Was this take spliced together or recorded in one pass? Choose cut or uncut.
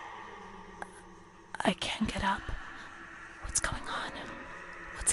uncut